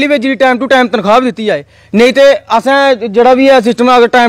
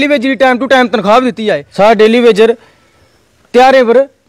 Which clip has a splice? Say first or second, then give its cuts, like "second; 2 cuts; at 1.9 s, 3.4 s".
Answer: second; 1 cut; at 1.6 s